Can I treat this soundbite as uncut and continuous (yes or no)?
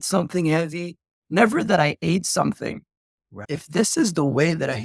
no